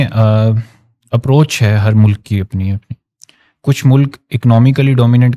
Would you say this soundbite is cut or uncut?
uncut